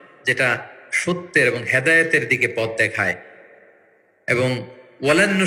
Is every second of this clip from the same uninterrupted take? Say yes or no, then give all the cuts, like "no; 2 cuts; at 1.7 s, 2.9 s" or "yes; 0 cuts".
yes; 0 cuts